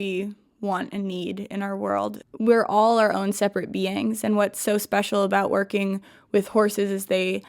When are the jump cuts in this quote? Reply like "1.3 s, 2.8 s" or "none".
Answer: 2.2 s